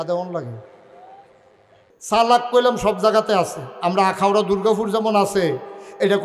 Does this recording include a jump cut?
yes; 1 cut; at 1.9 s

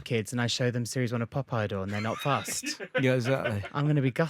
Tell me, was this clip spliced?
no; 0 cuts

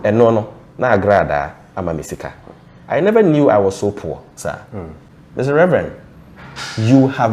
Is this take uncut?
no; 1 cut; at 5.1 s

